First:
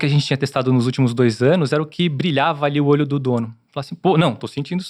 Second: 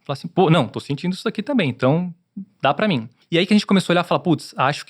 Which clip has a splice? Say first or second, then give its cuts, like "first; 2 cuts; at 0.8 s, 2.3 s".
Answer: second; 1 cut; at 3.1 s